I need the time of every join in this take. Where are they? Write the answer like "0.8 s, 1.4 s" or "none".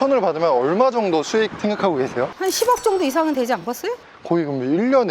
2.3 s, 4.0 s